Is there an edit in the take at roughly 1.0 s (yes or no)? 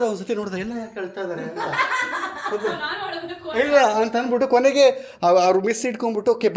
no